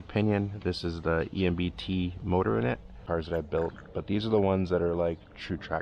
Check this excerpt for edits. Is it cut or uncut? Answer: cut